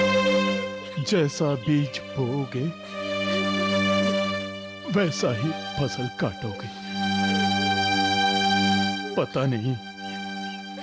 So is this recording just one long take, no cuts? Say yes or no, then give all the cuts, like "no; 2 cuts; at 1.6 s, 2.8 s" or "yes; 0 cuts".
yes; 0 cuts